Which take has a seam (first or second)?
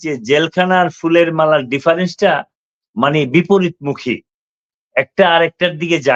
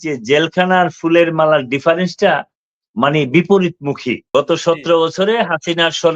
second